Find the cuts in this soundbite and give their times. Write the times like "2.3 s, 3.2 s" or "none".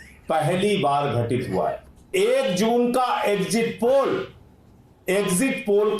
2.1 s